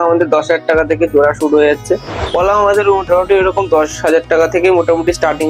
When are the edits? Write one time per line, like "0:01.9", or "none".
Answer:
0:02.2